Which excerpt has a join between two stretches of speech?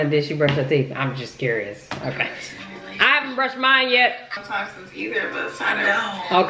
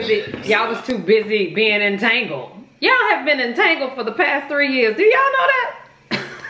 first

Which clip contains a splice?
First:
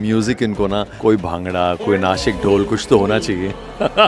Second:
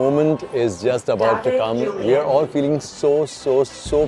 first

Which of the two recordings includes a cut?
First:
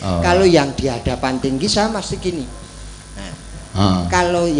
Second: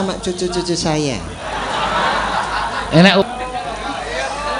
second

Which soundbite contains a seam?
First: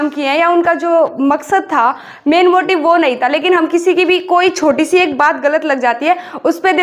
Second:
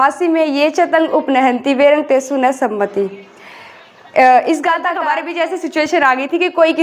second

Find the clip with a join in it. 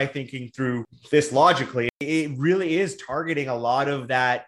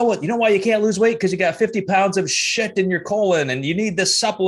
first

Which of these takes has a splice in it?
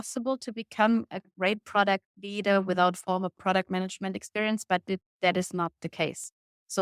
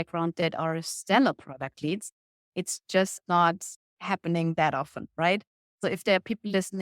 second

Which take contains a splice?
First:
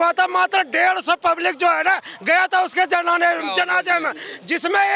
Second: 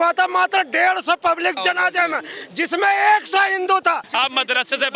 second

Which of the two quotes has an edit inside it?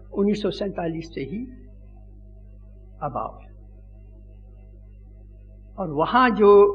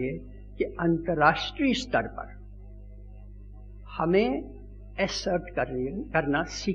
second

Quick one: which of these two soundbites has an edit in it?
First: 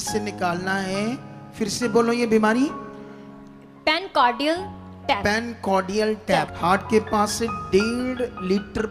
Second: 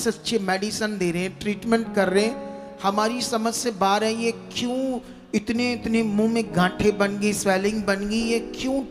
first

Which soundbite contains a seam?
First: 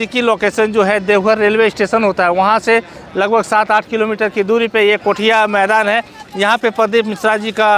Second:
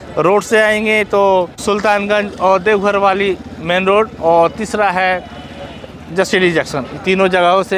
second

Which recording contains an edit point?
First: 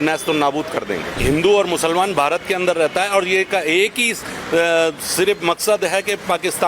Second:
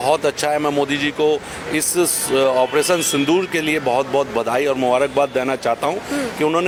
first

